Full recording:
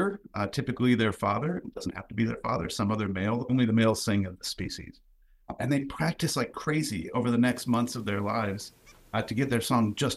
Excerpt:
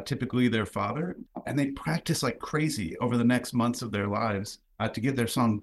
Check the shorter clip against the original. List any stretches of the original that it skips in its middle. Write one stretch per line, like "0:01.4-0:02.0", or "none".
0:01.7-0:05.4
0:08.7-0:08.9